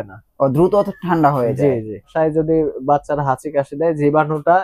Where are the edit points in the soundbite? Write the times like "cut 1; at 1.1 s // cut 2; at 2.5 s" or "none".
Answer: cut 1; at 2.1 s

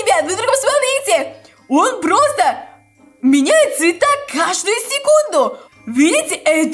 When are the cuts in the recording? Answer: cut 1; at 5.6 s

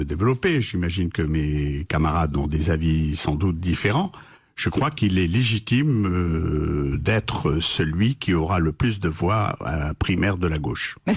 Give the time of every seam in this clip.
cut 1; at 8.7 s

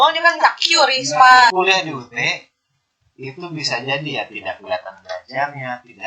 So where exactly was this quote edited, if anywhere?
cut 1; at 1.5 s

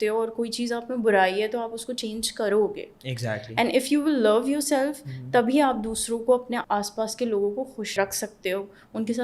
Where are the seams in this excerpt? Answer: cut 1; at 6.6 s // cut 2; at 7.9 s

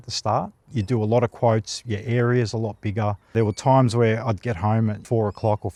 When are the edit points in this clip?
none

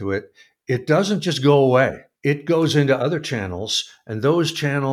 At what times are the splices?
cut 1; at 2.1 s

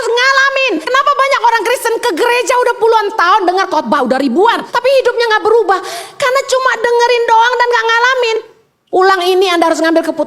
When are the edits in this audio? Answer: cut 1; at 0.8 s // cut 2; at 4.7 s // cut 3; at 8.3 s

